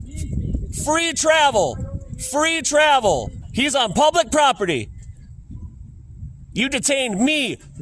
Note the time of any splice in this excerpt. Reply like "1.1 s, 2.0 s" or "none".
3.4 s